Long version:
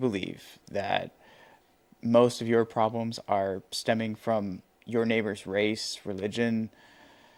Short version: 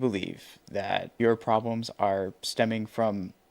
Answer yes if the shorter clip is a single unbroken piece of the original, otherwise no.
no